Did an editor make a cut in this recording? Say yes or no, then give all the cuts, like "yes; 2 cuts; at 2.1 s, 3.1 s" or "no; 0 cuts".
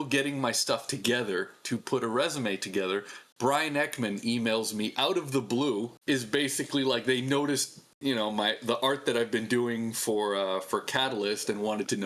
yes; 1 cut; at 5.9 s